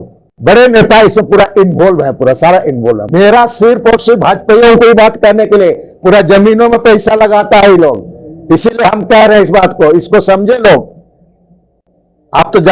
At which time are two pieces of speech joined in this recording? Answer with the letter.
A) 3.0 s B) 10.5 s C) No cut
A